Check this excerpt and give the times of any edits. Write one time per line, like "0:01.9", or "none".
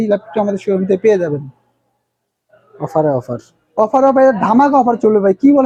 none